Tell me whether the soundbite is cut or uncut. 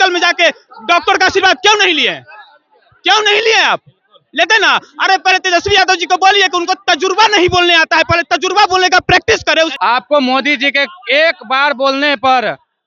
cut